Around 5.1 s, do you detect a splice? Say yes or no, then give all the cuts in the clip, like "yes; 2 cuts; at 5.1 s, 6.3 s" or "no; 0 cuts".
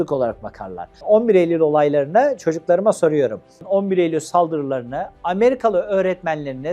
no; 1 cut; at 0.9 s